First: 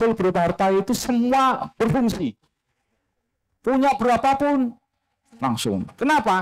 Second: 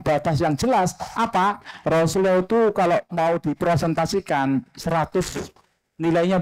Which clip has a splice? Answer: second; 1 cut; at 1.7 s

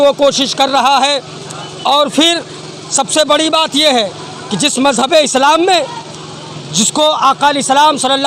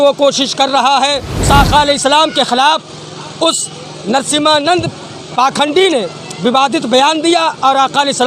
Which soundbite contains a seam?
second; 1 cut; at 1.5 s

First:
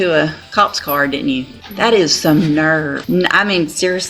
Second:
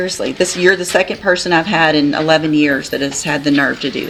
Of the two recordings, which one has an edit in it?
first; 2 cuts; at 1.6 s, 3.0 s

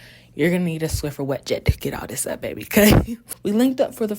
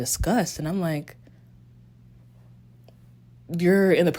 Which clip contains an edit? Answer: first; 1 cut; at 3.2 s

